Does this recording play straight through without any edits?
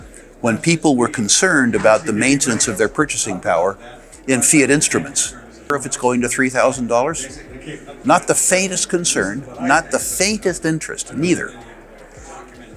no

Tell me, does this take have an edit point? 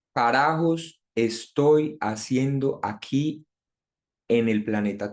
no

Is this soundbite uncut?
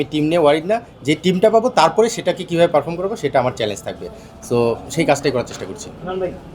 yes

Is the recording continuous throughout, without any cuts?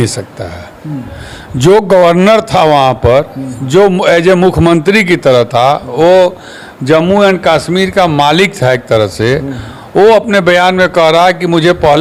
yes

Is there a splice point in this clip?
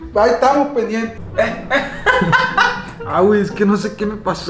yes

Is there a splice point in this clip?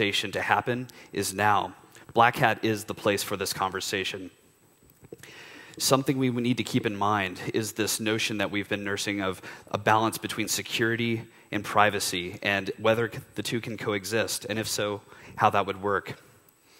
yes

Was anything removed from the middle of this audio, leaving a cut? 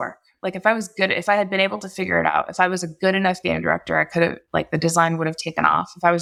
no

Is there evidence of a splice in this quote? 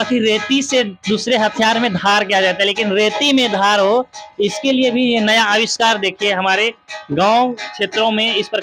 no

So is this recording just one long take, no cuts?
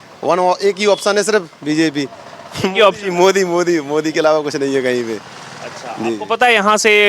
yes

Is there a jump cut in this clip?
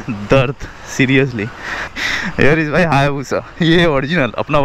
yes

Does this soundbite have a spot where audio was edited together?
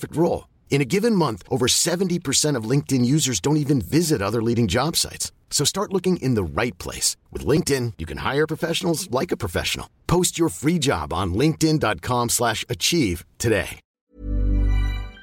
yes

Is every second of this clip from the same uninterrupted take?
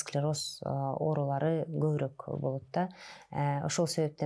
yes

